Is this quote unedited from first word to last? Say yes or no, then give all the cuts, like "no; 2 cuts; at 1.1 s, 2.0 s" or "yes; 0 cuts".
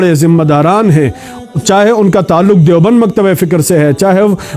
yes; 0 cuts